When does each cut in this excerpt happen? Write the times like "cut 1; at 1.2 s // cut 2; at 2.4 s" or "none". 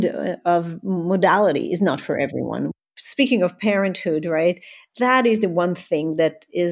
cut 1; at 2.7 s